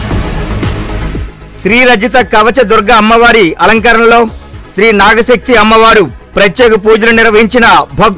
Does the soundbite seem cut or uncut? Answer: uncut